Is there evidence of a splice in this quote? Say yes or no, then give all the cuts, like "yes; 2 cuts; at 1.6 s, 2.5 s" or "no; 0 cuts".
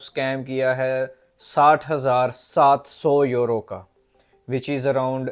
no; 0 cuts